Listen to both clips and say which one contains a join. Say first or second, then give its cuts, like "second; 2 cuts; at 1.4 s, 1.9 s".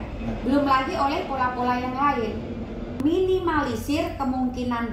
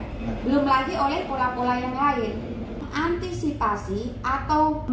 first; 1 cut; at 3.0 s